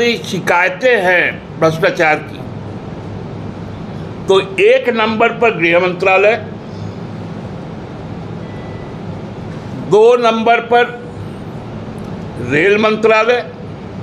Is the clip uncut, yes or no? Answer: yes